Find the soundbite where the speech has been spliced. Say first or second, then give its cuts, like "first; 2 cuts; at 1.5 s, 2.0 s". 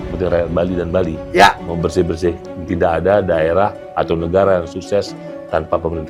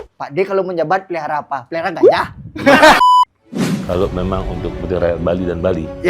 second; 1 cut; at 3.0 s